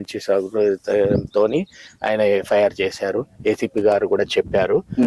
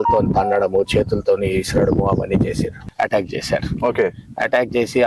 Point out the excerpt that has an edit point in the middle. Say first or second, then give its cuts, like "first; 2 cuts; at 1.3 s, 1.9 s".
second; 1 cut; at 2.9 s